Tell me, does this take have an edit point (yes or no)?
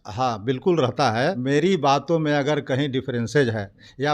yes